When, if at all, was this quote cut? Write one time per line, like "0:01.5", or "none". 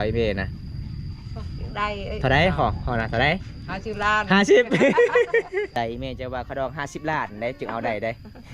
0:05.7